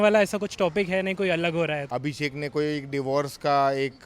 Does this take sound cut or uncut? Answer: cut